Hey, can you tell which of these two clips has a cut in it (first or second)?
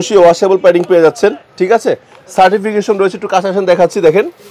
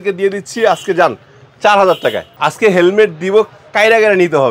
second